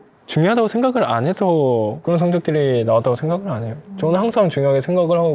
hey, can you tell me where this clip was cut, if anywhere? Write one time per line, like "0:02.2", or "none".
0:03.8

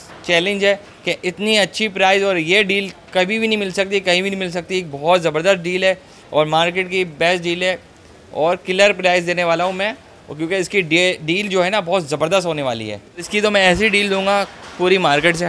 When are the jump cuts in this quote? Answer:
0:13.3

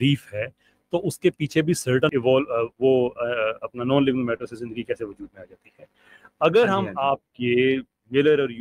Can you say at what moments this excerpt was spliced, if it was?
0:02.1

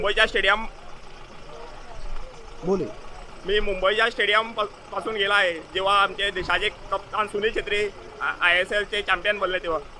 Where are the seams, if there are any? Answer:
none

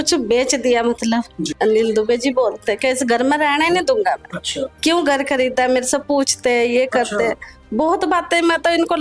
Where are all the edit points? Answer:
0:01.5

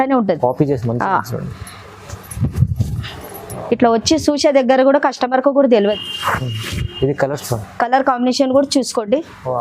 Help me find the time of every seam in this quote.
0:06.0

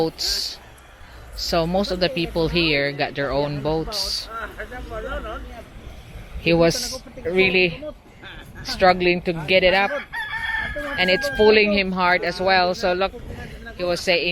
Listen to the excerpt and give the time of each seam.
0:05.7

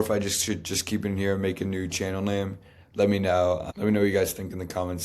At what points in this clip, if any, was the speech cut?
0:03.7

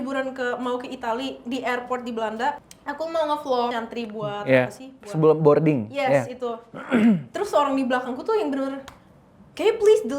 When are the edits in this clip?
0:02.7
0:03.7

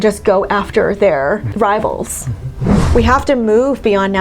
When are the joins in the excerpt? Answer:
0:01.5
0:02.5

